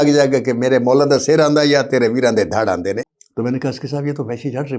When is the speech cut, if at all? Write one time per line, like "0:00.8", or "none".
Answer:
0:03.0